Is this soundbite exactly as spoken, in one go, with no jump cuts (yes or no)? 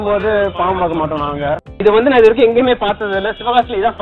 no